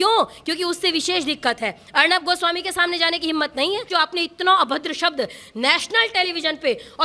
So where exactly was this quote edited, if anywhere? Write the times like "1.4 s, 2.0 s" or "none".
3.9 s